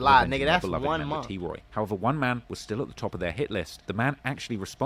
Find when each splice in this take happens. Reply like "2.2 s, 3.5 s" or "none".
none